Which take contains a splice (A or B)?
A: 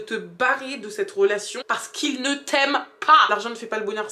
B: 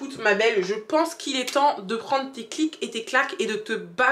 A